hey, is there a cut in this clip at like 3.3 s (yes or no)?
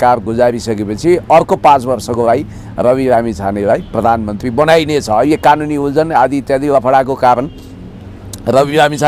no